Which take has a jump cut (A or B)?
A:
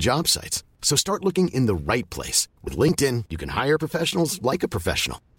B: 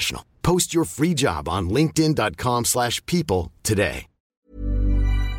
B